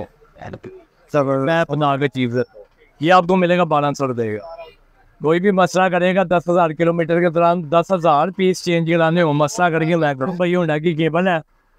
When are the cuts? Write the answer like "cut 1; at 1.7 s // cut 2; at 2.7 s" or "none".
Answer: none